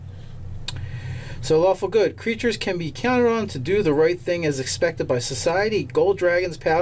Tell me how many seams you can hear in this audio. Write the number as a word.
one